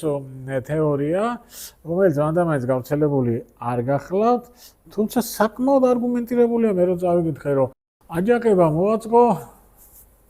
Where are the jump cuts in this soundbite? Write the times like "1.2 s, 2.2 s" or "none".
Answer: none